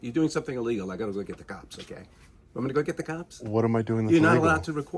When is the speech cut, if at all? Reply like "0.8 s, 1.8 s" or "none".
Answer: none